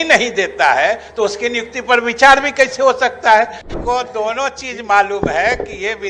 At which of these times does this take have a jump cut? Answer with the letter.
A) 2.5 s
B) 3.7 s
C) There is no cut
B